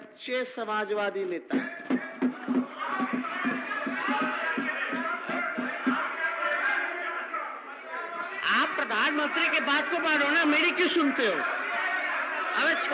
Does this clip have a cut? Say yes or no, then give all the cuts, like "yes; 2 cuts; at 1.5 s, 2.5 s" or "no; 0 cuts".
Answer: no; 0 cuts